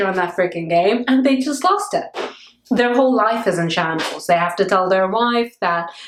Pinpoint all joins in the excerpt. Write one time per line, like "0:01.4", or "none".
none